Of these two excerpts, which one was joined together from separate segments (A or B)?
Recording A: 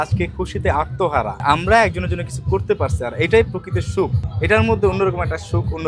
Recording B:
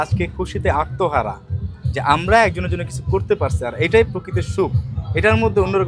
A